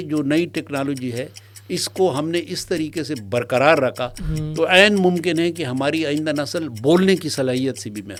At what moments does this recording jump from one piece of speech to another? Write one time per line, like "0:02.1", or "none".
none